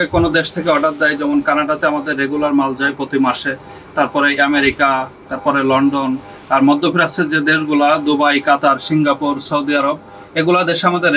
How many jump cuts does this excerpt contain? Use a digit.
0